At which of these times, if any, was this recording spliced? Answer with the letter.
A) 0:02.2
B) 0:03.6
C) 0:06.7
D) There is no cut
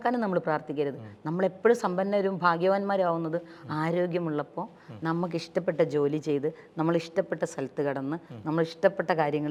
D